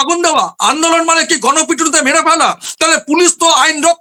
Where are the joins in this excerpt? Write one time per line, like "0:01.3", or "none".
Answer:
none